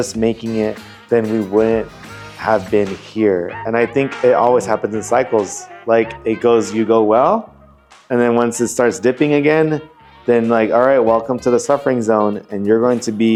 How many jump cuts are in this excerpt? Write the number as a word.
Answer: zero